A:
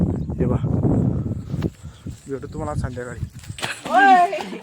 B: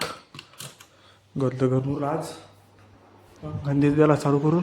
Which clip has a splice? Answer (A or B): A